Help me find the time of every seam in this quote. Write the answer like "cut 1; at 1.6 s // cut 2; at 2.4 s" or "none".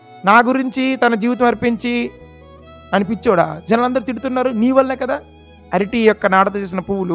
cut 1; at 5.6 s